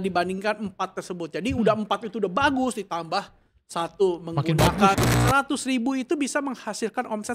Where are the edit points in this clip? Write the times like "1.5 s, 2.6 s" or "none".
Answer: 5.0 s